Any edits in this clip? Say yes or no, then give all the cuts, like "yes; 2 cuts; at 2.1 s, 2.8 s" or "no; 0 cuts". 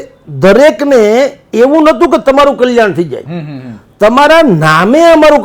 no; 0 cuts